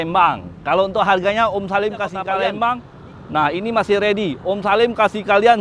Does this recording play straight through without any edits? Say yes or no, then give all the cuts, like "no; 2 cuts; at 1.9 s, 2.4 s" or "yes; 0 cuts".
no; 1 cut; at 2.3 s